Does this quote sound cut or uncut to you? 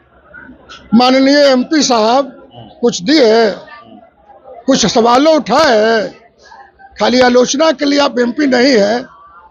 uncut